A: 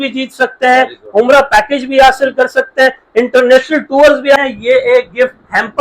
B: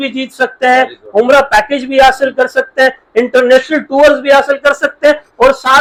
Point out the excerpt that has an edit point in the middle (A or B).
A